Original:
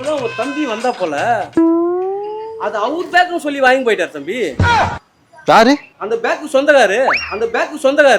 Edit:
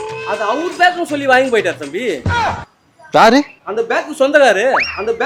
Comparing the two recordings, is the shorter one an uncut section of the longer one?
yes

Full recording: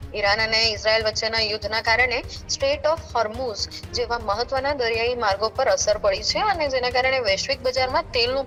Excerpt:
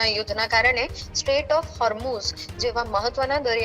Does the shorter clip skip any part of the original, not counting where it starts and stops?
no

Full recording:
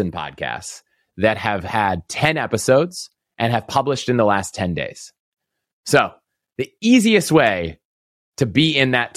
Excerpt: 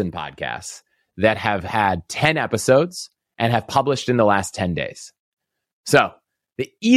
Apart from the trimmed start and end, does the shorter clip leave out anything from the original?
no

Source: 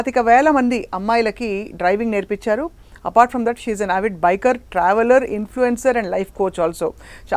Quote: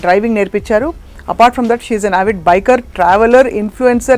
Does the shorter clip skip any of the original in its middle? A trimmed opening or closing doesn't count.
no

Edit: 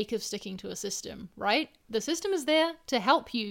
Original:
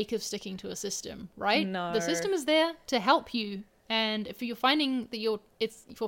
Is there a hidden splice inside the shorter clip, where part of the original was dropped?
no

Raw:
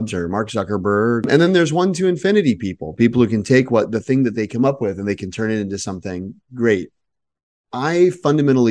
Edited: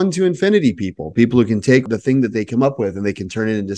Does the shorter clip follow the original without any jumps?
no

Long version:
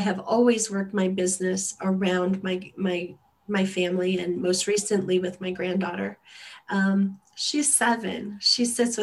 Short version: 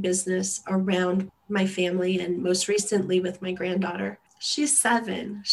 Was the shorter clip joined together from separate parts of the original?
yes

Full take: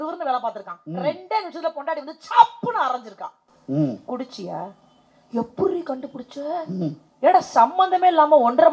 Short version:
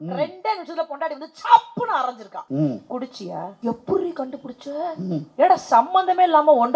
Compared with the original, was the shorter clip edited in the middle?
yes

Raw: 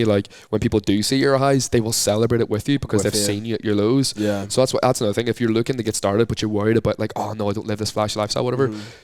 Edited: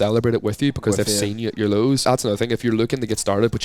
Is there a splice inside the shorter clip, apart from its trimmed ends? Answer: yes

